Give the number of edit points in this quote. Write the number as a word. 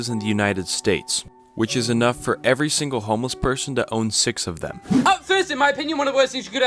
one